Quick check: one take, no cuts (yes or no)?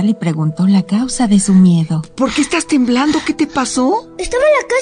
yes